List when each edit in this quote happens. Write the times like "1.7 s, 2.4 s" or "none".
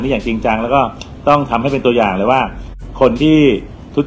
none